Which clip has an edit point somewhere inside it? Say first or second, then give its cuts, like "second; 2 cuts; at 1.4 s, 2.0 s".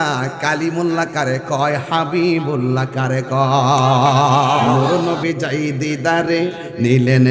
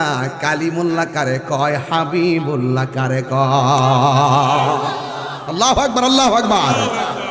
first; 1 cut; at 4.8 s